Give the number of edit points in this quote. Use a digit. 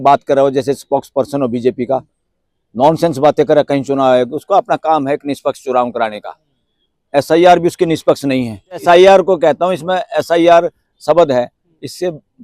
1